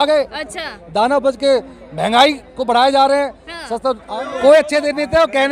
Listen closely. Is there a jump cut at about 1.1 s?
no; 1 cut; at 4.1 s

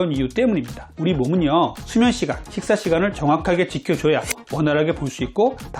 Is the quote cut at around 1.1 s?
no; 1 cut; at 4.3 s

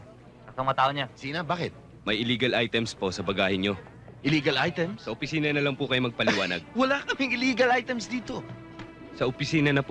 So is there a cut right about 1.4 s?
yes; 1 cut; at 1.4 s

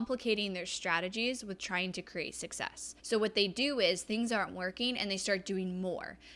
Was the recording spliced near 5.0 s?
no; 1 cut; at 2.9 s

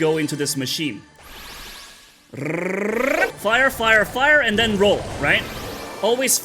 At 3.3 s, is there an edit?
yes; 1 cut; at 3.3 s

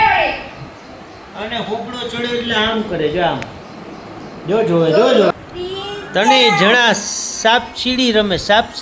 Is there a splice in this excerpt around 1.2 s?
no; 1 cut; at 5.3 s

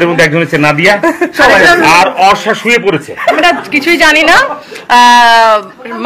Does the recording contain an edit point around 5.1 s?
no; 1 cut; at 3.4 s

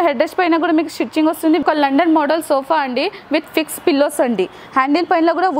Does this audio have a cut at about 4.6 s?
yes; 2 cuts; at 1.6 s, 4.6 s

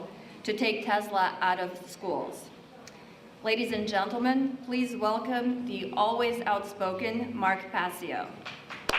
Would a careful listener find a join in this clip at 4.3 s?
yes; 1 cut; at 4.3 s

